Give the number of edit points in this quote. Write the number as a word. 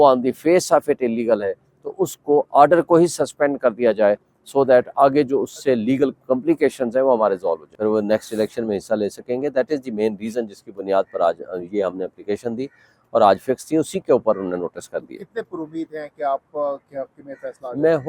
one